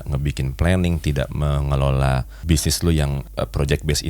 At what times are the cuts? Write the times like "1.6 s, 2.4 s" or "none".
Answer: 2.4 s, 3.2 s